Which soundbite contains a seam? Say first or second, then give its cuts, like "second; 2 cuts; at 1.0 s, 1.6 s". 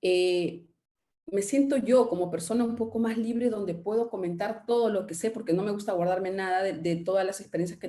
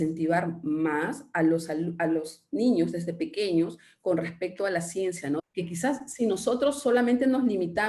second; 1 cut; at 5.4 s